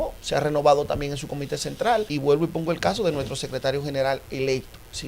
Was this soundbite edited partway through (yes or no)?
yes